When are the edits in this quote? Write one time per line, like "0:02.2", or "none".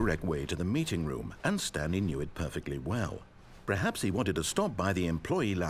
none